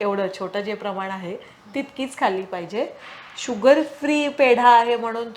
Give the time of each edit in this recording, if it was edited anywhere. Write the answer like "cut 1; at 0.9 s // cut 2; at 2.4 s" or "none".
none